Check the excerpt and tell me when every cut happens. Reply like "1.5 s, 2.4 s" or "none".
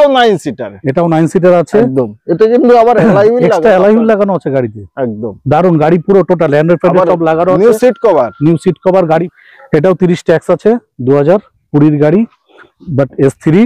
9.3 s